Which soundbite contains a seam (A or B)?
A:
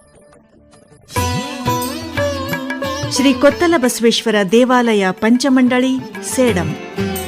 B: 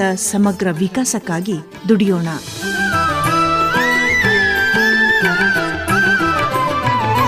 A